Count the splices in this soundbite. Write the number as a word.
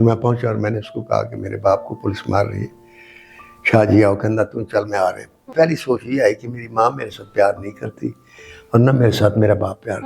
one